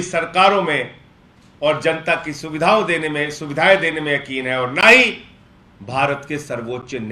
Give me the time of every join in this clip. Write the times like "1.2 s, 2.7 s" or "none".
none